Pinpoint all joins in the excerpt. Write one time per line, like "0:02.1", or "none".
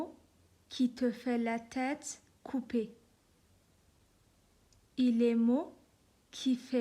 0:04.0

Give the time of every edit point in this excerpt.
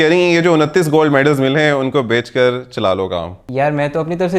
0:03.4

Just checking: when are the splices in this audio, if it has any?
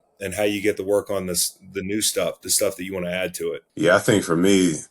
0:03.7

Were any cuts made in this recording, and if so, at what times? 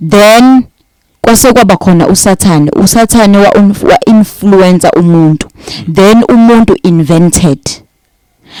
none

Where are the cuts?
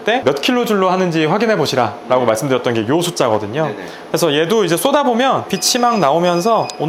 none

